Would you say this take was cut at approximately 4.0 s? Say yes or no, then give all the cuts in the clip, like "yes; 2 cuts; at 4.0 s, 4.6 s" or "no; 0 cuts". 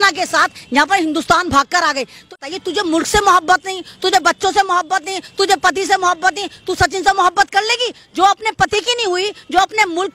no; 1 cut; at 2.4 s